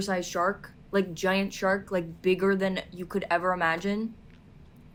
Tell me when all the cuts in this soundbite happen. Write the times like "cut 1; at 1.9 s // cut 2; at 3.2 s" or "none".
none

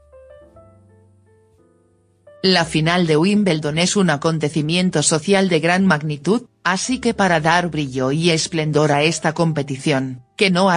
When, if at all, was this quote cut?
none

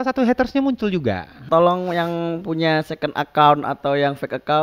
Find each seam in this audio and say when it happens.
cut 1; at 1.4 s

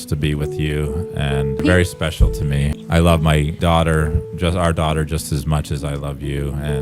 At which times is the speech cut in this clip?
cut 1; at 1.6 s // cut 2; at 2.8 s // cut 3; at 3.6 s

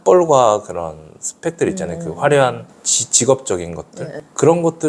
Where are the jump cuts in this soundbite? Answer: none

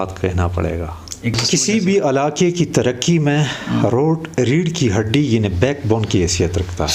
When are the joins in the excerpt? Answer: cut 1; at 1.3 s

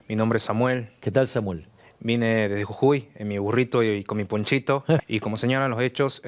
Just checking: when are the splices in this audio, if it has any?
cut 1; at 5.0 s

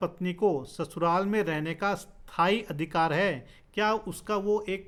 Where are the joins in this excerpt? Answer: none

